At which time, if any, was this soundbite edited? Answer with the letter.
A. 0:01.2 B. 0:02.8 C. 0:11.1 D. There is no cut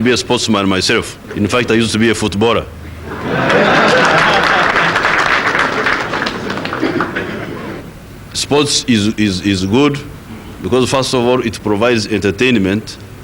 A